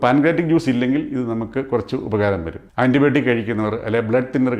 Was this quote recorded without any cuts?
no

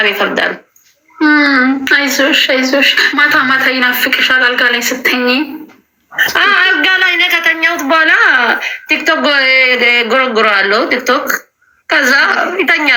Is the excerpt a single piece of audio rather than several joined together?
yes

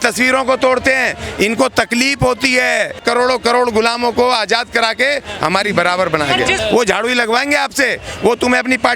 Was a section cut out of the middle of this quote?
yes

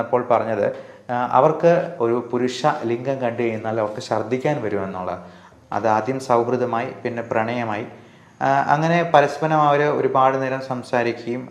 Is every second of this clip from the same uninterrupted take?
no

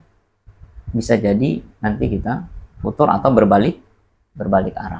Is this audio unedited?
yes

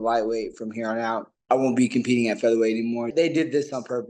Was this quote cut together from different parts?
yes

